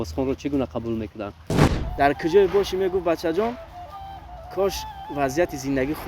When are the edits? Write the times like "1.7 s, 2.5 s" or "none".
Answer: 1.7 s